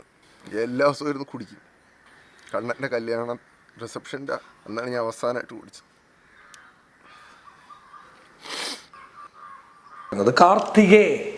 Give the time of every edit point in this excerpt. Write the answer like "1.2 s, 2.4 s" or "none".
10.2 s